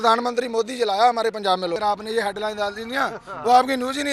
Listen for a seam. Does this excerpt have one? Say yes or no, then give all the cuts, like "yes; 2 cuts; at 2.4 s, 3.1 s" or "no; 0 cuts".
yes; 1 cut; at 1.8 s